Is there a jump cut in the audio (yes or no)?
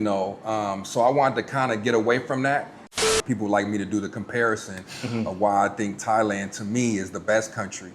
yes